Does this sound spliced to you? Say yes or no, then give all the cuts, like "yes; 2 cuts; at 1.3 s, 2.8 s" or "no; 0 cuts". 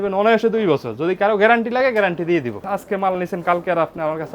yes; 1 cut; at 2.7 s